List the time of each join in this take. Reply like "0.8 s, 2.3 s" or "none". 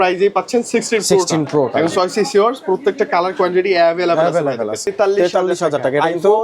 4.9 s